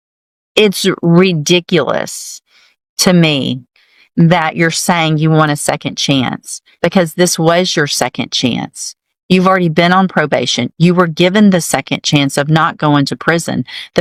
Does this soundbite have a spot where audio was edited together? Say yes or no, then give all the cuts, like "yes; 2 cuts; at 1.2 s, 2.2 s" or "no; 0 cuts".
no; 0 cuts